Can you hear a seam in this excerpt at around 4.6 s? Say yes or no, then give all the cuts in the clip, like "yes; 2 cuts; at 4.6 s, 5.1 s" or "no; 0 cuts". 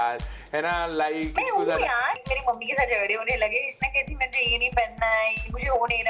no; 1 cut; at 2.2 s